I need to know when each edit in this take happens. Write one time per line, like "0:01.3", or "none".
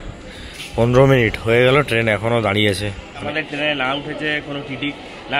0:03.2

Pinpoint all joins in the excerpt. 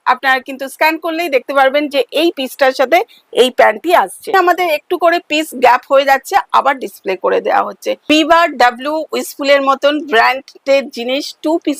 0:04.3
0:07.9

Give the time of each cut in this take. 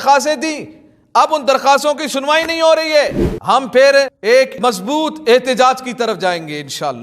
0:03.3

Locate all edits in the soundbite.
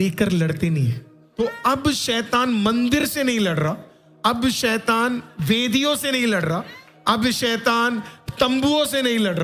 0:01.2

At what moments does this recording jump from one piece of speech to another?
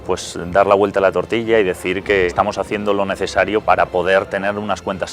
0:02.3
0:03.6

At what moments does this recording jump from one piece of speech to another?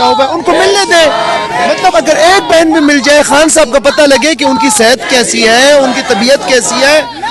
none

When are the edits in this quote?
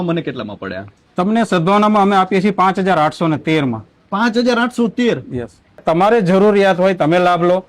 0:05.8

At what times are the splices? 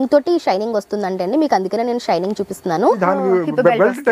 0:03.0

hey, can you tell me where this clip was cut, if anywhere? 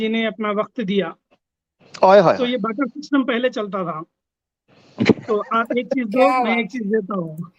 none

